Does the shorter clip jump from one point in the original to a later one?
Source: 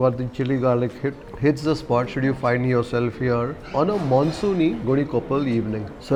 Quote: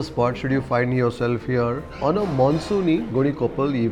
no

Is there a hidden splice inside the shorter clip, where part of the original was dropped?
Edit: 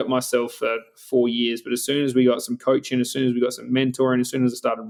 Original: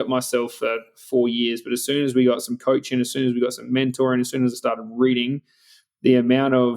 no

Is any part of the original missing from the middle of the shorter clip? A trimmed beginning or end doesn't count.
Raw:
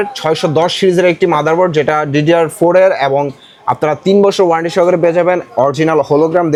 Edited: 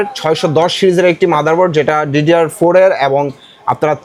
no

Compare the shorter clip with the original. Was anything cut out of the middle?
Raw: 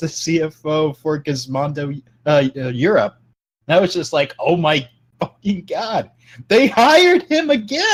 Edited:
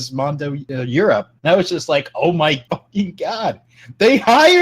yes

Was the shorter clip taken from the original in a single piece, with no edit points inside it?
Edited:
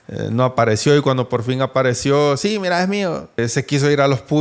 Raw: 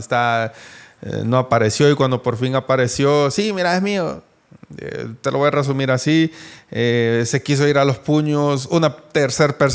no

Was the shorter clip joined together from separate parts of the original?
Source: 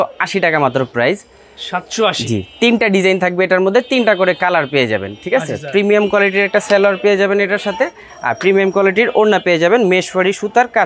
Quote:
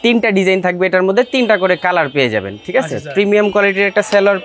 no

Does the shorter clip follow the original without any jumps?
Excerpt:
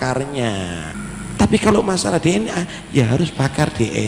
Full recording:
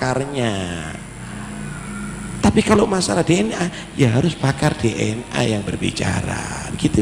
no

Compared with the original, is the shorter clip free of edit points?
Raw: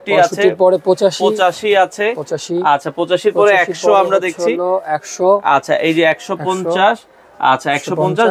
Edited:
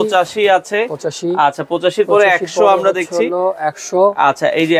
yes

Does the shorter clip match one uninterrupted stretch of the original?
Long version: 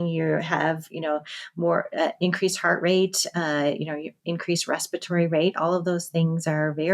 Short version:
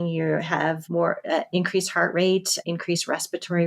no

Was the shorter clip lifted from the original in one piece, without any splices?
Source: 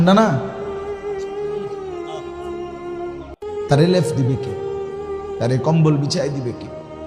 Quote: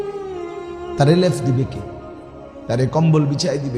no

